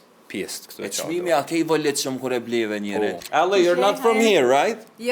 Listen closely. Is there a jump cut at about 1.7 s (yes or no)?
no